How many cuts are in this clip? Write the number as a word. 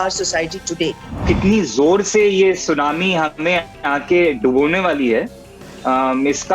one